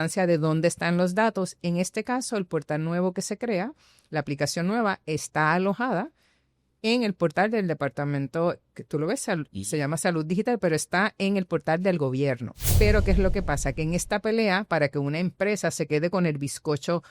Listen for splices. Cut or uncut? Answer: cut